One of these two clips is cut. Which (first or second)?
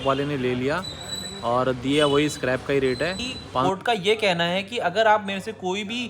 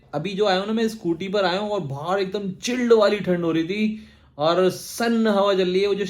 first